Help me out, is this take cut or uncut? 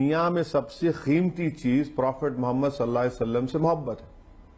uncut